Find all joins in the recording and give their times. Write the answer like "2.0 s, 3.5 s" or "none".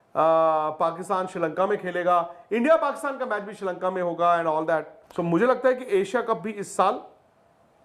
5.0 s